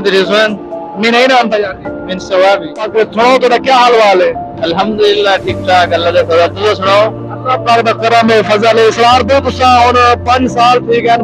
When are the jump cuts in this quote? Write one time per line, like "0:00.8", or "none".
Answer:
0:02.9